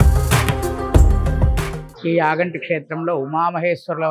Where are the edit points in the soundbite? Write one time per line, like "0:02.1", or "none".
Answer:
0:01.8